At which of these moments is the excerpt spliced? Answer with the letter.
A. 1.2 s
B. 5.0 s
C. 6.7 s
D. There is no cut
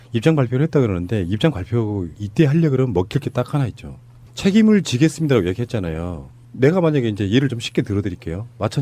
D